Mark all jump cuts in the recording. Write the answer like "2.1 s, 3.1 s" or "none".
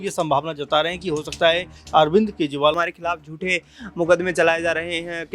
2.8 s